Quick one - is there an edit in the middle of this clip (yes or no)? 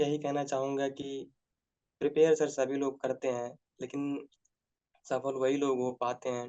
no